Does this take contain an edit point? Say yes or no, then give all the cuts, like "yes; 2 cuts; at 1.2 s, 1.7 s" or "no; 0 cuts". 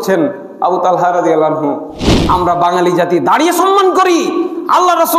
yes; 1 cut; at 2.1 s